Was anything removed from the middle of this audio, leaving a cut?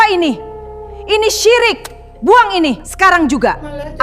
yes; 1 cut; at 2.9 s

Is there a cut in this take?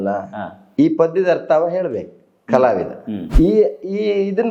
yes; 1 cut; at 3.2 s

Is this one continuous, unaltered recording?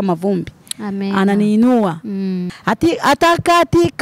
no; 1 cut; at 2.5 s

